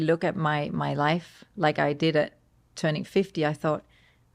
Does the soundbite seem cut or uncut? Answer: uncut